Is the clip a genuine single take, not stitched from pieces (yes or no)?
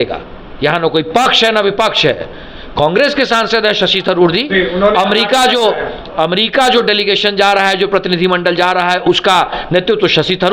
yes